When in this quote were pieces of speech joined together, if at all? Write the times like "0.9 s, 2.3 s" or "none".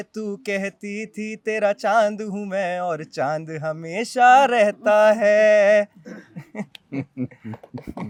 none